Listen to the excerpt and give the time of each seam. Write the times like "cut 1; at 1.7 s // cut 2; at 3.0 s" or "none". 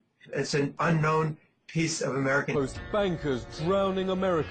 none